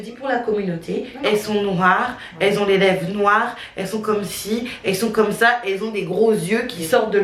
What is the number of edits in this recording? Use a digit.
1